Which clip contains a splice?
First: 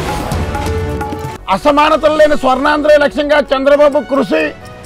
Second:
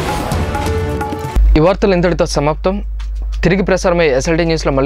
first; 1 cut; at 0.9 s

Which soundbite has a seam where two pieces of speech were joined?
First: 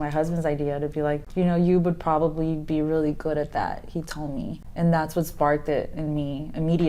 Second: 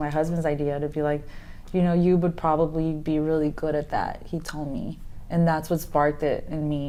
first; 2 cuts; at 1.3 s, 4.6 s

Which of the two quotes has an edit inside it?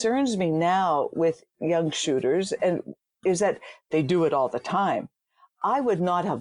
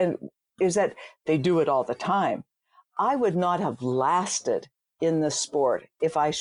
first; 1 cut; at 1.5 s

